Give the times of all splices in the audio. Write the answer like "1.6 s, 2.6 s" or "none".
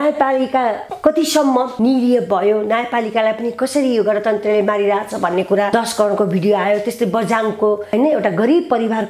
0.9 s, 1.7 s, 5.7 s, 7.9 s